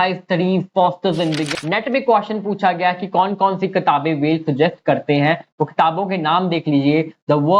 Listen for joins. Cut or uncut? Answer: cut